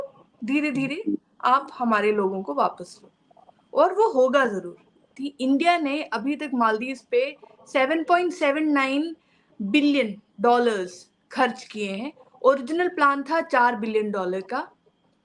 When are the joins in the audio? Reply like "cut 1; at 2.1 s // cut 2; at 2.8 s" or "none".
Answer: cut 1; at 5.2 s